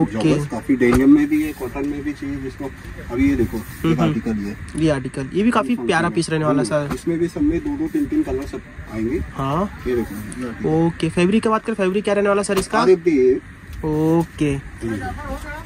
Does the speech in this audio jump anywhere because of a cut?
no; 0 cuts

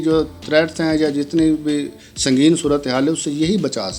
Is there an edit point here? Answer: no; 0 cuts

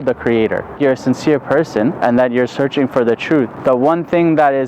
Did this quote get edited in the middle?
yes; 3 cuts; at 0.8 s, 2.0 s, 3.5 s

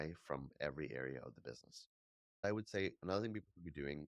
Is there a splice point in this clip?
yes; 1 cut; at 2.4 s

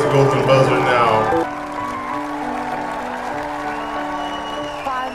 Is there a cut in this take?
no; 0 cuts

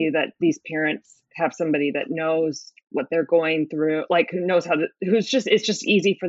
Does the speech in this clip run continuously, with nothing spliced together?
yes; 0 cuts

